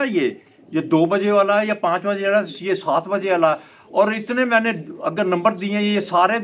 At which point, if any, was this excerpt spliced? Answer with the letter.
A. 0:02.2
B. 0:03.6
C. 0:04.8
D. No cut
D